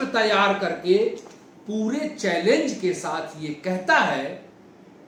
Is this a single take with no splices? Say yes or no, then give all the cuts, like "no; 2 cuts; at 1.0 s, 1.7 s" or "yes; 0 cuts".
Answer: yes; 0 cuts